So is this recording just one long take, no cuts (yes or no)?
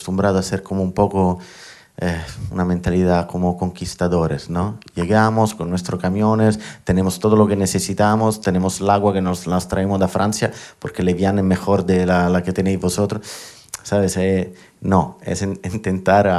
yes